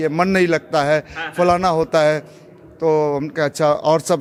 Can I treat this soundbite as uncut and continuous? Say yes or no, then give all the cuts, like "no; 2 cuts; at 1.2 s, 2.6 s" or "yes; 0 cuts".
yes; 0 cuts